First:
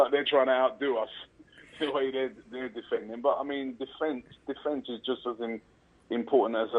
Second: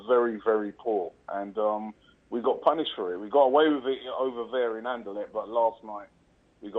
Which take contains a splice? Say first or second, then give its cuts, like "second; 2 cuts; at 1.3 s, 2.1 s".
first; 1 cut; at 3.0 s